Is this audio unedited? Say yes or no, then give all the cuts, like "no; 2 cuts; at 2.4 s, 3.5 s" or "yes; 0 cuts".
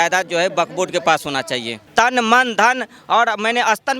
no; 1 cut; at 1.9 s